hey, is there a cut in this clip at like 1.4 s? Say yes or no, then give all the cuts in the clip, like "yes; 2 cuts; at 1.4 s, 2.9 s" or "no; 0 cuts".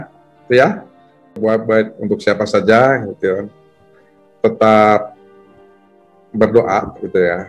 yes; 1 cut; at 1.4 s